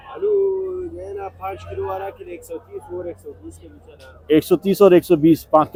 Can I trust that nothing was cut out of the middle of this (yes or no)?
yes